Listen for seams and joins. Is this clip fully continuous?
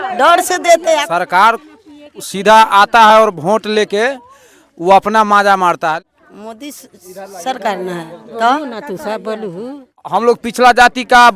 no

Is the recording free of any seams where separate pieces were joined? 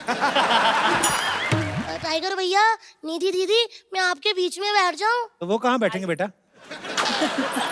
no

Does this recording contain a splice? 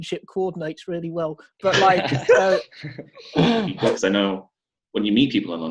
yes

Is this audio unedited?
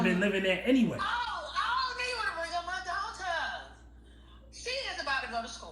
yes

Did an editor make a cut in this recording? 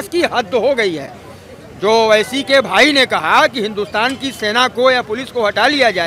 no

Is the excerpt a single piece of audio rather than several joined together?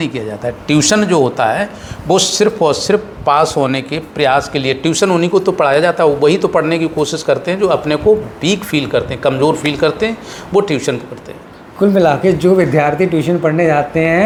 yes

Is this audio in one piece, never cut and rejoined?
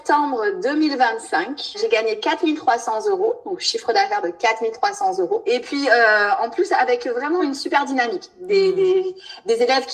no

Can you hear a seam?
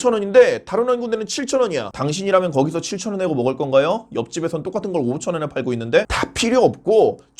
yes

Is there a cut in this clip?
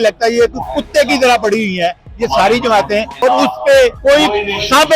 yes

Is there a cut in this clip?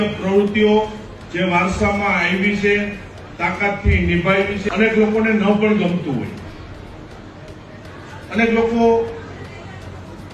yes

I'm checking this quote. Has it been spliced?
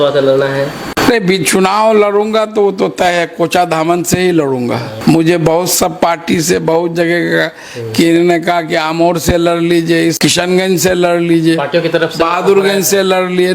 yes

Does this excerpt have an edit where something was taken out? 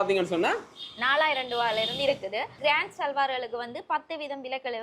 yes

